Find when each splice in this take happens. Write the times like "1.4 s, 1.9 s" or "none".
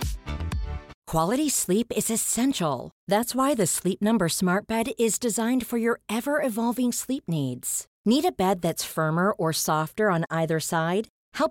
1.0 s

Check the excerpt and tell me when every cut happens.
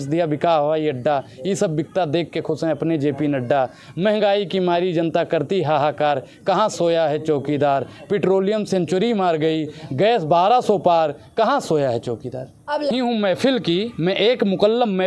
12.9 s

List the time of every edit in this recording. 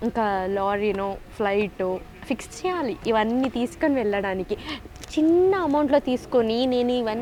none

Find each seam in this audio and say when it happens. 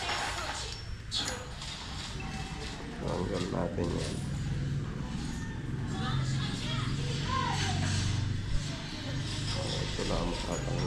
none

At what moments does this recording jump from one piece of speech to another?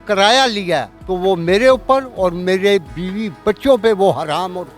1.0 s, 3.0 s

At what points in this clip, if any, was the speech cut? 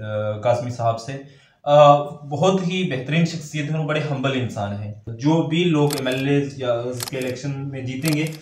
5.0 s

